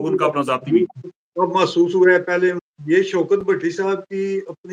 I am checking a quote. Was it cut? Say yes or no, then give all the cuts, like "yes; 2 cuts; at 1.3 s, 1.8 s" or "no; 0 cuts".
yes; 1 cut; at 2.6 s